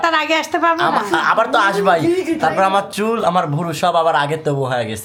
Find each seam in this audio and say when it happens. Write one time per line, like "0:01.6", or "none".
none